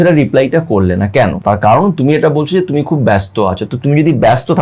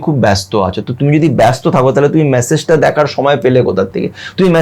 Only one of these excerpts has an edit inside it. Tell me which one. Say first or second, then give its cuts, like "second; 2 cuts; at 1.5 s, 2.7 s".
first; 1 cut; at 1.4 s